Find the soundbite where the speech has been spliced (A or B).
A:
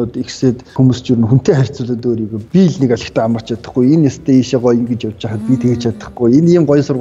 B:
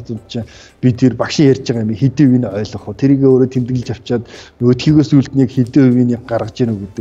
A